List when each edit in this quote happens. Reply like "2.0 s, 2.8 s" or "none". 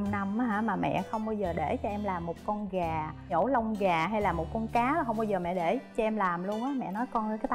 none